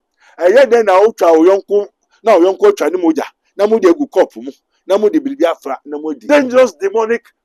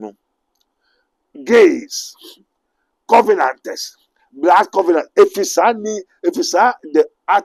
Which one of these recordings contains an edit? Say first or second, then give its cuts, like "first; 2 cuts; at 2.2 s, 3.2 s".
first; 1 cut; at 6.2 s